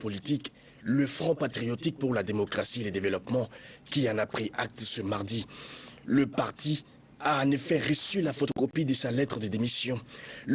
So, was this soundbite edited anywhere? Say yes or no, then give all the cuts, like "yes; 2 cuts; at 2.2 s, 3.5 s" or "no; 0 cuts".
yes; 1 cut; at 4.7 s